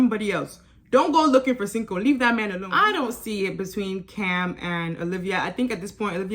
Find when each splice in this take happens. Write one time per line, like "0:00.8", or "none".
0:02.6